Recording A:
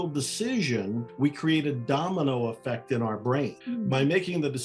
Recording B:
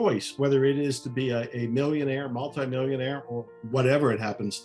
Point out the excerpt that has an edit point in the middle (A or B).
A